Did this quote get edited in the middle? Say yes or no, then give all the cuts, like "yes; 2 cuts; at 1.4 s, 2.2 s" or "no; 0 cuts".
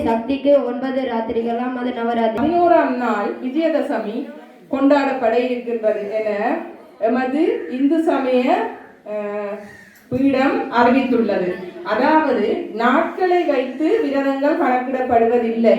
yes; 1 cut; at 2.4 s